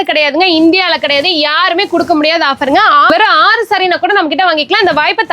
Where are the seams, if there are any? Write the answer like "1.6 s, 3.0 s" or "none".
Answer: 3.1 s